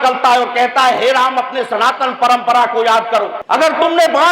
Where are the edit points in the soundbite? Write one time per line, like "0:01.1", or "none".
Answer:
0:03.4